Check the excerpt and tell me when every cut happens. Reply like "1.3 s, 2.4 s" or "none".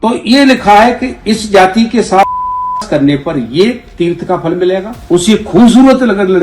4.9 s